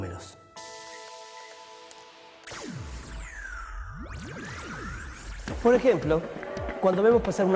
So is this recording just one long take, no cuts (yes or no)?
no